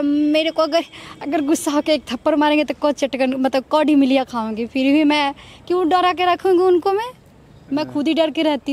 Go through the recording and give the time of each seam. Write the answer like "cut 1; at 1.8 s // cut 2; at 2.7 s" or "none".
none